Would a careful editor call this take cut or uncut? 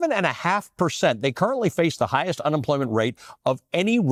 uncut